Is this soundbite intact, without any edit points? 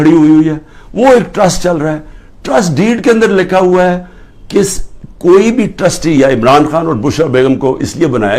yes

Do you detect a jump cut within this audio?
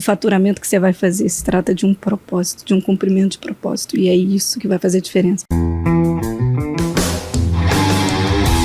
yes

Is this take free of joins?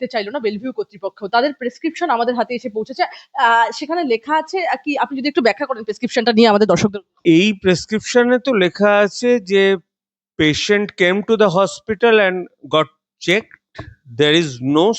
yes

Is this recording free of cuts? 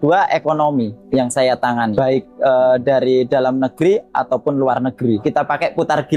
no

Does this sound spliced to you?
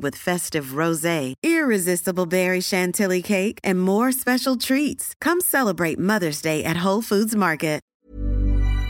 yes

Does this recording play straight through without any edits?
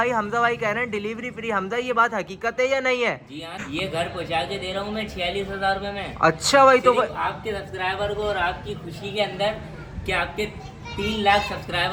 yes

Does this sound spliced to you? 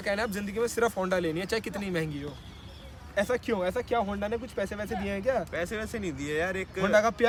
no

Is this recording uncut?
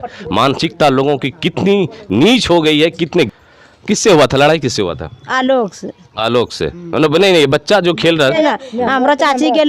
no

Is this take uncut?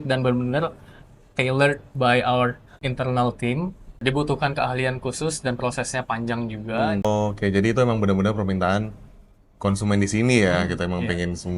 no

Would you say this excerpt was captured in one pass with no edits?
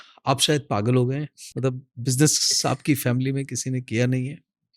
no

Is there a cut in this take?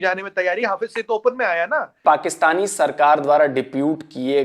yes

